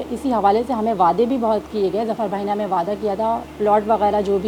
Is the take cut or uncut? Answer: cut